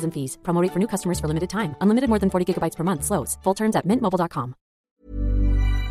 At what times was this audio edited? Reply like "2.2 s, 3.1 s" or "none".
4.9 s